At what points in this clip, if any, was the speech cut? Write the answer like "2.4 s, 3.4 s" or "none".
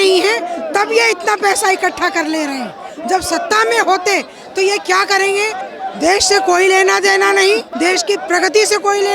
5.7 s, 7.7 s